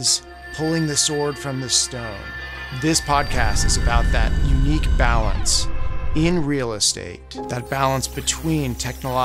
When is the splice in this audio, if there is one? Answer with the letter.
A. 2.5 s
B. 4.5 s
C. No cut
C